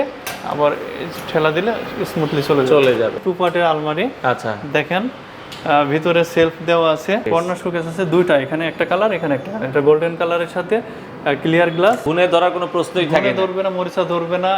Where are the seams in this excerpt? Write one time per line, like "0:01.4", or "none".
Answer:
0:03.2
0:07.2
0:12.0